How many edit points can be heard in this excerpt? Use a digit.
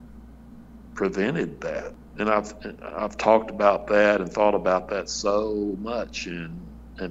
1